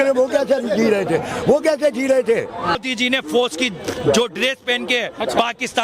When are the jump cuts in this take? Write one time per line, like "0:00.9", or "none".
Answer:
0:02.8